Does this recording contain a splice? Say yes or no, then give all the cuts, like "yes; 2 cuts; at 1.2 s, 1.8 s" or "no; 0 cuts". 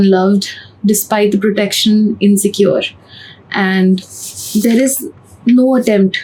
no; 0 cuts